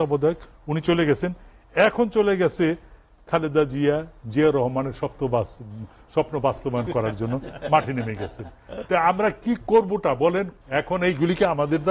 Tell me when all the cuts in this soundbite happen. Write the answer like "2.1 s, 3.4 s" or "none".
10.6 s